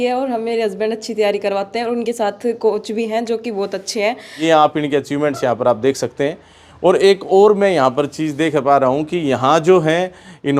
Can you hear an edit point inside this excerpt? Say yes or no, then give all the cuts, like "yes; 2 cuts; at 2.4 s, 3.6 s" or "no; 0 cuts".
yes; 1 cut; at 4.4 s